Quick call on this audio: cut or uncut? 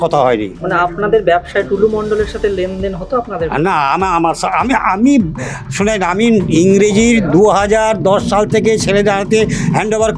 uncut